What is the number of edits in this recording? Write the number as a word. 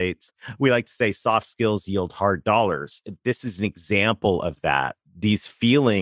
one